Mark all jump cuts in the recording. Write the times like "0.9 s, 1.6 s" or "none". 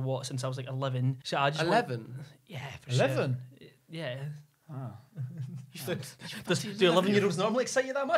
1.2 s